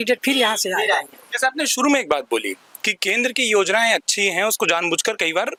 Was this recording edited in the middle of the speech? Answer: no; 0 cuts

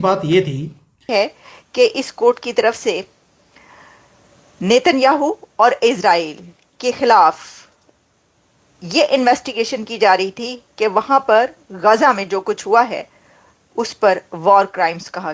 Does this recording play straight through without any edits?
no; 1 cut; at 1.1 s

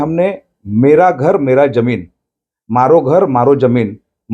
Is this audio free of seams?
yes; 0 cuts

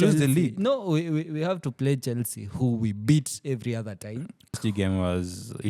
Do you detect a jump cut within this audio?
yes; 1 cut; at 4.6 s

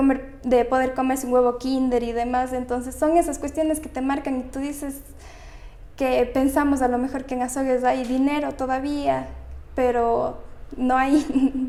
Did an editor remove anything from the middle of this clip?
no; 0 cuts

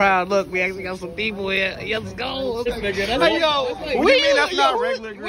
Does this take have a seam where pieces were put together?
yes; 1 cut; at 2.5 s

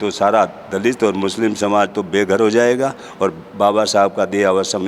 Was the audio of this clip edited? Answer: no; 0 cuts

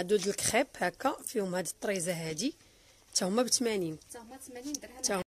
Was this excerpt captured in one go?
yes; 0 cuts

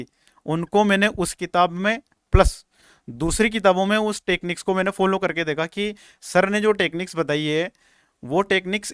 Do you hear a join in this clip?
no; 0 cuts

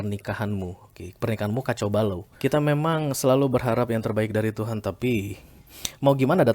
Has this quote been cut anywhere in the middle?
yes; 1 cut; at 2.3 s

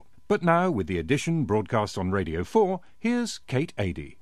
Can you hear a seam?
no; 0 cuts

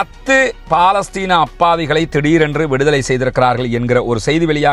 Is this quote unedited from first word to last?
yes; 0 cuts

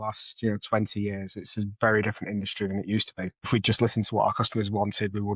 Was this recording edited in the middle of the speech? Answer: yes; 1 cut; at 3.5 s

